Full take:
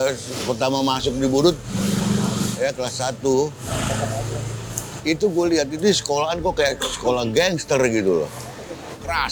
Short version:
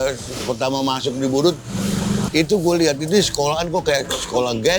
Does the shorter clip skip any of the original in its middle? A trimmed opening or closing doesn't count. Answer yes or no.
yes